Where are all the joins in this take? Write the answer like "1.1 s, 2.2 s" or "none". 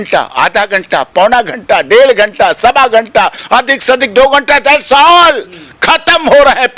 none